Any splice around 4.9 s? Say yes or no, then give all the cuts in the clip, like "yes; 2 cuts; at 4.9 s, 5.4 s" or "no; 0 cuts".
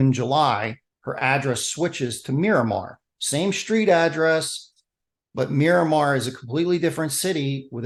no; 0 cuts